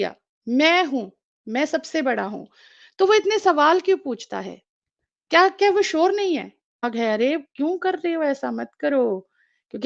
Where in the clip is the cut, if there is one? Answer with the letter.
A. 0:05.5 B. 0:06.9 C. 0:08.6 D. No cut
B